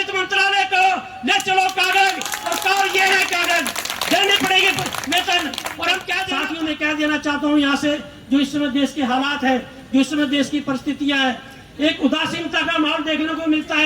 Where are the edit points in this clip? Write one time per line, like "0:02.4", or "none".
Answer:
0:06.2